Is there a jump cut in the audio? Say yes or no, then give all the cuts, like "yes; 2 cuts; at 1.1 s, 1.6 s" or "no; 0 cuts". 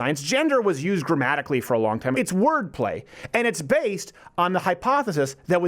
yes; 1 cut; at 2.1 s